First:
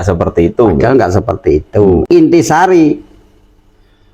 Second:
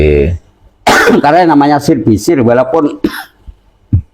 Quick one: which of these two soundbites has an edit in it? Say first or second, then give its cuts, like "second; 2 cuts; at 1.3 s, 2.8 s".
first; 1 cut; at 2.0 s